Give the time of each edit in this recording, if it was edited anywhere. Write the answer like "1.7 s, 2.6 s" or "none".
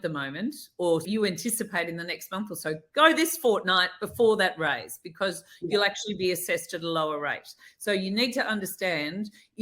1.0 s